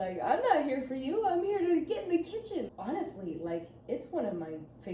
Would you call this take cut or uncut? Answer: cut